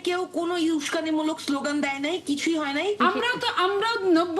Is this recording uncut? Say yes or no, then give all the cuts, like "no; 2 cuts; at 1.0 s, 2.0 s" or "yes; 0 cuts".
no; 1 cut; at 3.0 s